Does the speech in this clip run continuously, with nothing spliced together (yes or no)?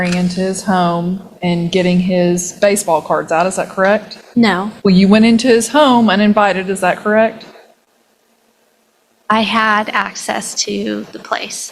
no